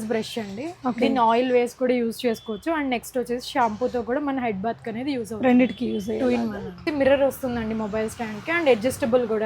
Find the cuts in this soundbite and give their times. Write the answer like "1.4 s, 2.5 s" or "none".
6.8 s